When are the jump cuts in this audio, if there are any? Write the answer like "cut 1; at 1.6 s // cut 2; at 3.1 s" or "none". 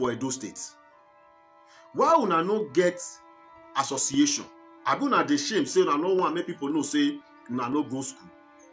none